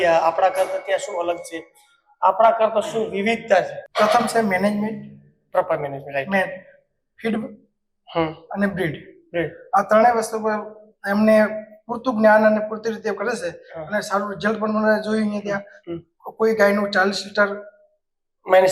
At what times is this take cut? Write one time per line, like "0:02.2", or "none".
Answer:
0:03.8